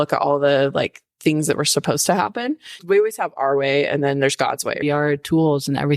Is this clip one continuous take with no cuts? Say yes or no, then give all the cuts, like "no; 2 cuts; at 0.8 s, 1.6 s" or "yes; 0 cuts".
no; 2 cuts; at 2.8 s, 4.8 s